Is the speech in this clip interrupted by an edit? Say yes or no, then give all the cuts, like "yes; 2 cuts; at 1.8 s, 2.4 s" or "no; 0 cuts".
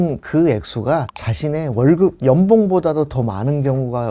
no; 0 cuts